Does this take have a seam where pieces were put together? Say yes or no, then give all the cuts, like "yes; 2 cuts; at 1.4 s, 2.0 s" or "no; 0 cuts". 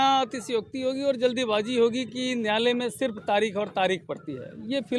no; 0 cuts